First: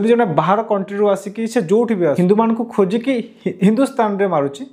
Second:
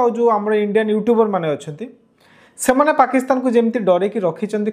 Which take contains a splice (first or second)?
first